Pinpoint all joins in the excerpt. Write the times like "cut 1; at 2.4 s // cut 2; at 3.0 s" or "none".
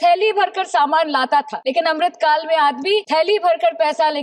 cut 1; at 1.6 s // cut 2; at 3.1 s